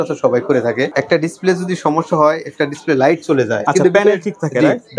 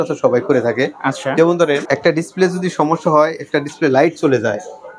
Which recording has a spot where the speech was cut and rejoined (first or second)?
first